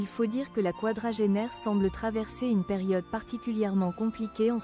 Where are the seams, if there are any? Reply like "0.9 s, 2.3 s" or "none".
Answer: none